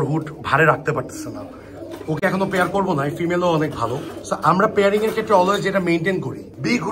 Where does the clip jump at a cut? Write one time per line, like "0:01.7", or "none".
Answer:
none